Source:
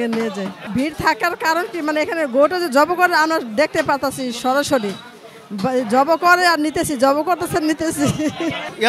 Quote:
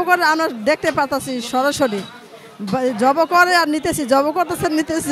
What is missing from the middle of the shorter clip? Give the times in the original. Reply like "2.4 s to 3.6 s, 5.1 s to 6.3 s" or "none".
none

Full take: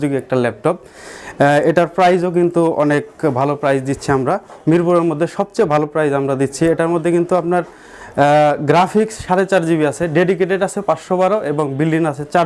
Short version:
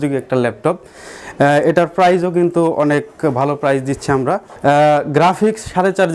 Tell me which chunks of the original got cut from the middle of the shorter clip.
4.5 s to 8.0 s

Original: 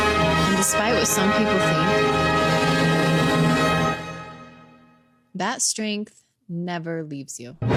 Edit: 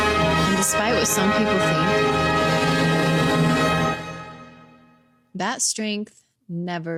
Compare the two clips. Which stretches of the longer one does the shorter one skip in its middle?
none

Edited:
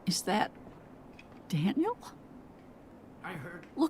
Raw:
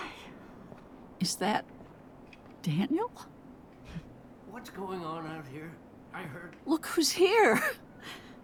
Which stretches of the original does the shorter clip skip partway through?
3.9 s to 5.7 s

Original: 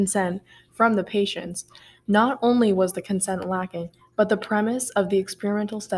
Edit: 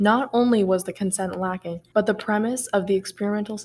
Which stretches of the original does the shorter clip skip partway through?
3.8 s to 4.0 s

